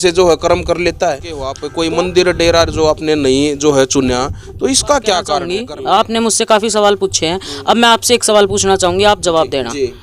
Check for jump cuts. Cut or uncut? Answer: cut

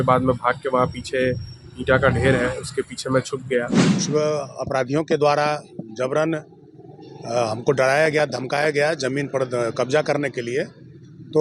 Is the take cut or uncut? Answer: cut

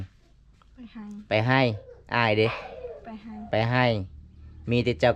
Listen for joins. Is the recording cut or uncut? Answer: uncut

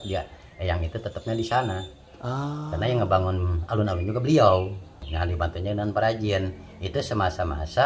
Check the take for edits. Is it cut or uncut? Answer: cut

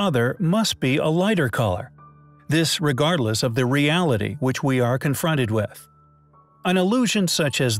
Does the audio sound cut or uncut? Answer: uncut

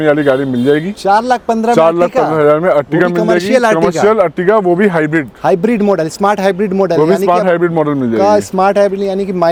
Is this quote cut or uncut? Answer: uncut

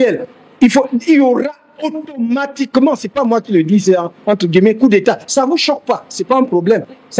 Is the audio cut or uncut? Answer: uncut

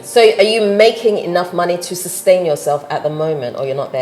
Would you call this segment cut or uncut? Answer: uncut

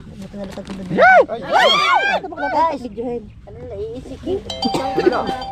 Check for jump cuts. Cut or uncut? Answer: cut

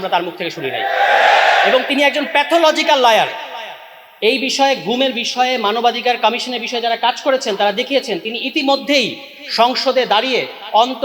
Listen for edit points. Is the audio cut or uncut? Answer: uncut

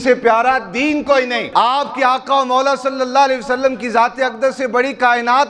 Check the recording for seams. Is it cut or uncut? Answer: cut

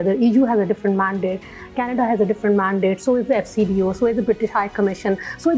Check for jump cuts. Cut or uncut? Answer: uncut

